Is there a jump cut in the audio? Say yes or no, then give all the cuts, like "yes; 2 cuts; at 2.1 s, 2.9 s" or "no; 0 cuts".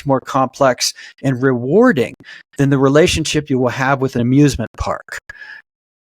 yes; 1 cut; at 4.2 s